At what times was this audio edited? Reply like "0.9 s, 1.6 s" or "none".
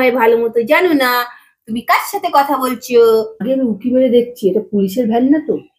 3.4 s